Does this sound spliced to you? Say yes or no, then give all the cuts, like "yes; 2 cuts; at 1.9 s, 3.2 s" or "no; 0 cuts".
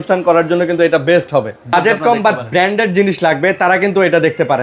yes; 1 cut; at 1.7 s